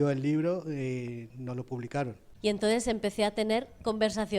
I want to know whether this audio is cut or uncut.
cut